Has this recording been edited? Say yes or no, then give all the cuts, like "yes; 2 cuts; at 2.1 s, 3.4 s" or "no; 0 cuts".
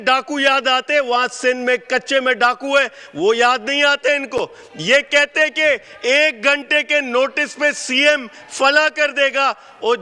no; 0 cuts